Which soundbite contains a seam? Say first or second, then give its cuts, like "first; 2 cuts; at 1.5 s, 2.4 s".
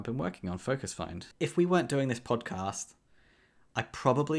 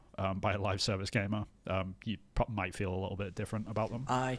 first; 1 cut; at 1.2 s